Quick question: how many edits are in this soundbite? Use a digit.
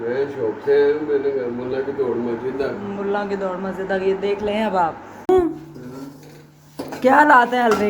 1